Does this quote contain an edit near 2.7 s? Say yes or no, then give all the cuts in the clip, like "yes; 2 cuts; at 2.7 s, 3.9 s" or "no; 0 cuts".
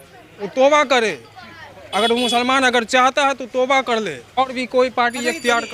no; 1 cut; at 4.4 s